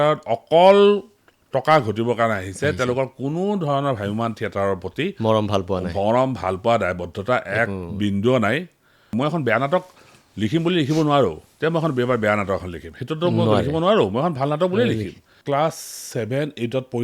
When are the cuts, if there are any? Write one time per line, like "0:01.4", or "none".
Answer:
0:09.1
0:15.3